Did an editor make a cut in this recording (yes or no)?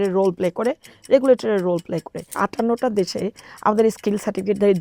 yes